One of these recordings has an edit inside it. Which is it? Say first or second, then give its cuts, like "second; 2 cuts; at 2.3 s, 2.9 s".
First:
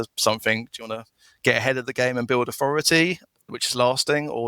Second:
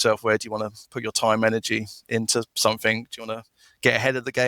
first; 1 cut; at 3.5 s